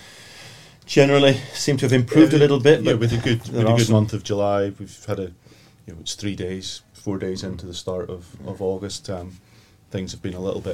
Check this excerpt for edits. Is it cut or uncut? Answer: uncut